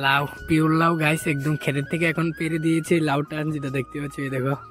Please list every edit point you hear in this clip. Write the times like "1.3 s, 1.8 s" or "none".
none